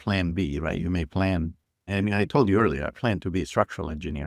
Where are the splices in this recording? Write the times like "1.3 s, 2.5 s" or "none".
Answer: 1.9 s